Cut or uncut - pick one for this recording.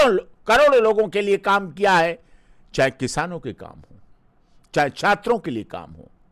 uncut